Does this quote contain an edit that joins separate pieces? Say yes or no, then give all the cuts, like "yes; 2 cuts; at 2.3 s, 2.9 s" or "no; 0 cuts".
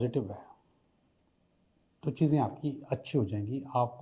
no; 0 cuts